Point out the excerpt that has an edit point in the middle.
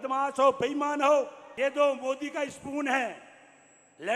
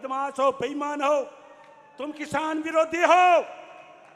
first; 1 cut; at 1.4 s

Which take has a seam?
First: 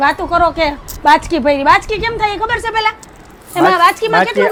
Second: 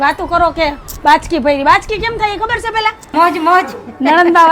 second; 1 cut; at 3.1 s

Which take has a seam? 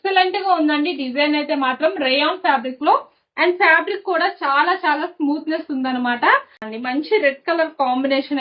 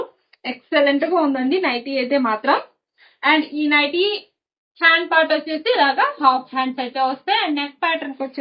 first; 1 cut; at 6.7 s

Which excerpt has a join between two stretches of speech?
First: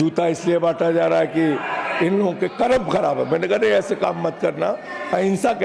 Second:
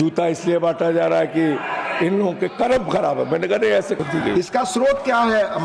second; 1 cut; at 4.0 s

